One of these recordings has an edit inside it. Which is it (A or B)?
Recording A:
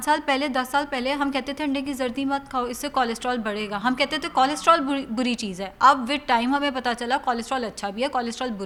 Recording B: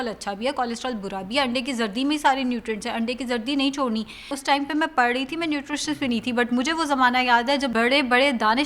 B